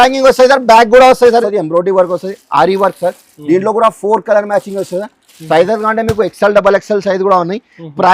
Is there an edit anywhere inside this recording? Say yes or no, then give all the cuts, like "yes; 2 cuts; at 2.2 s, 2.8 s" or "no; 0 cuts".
yes; 1 cut; at 1.4 s